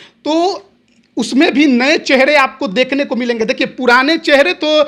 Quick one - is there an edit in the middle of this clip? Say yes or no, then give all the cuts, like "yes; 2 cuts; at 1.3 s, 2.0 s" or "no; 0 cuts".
no; 0 cuts